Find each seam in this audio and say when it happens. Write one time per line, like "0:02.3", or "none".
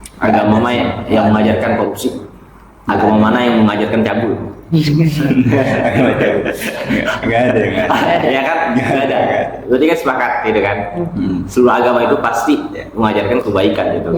none